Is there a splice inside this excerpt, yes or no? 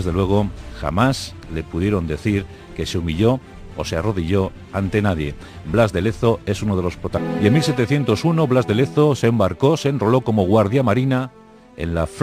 no